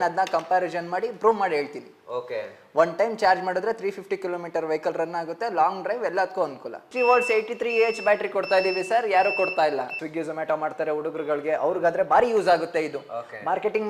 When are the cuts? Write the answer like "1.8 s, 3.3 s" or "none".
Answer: 6.8 s, 10.0 s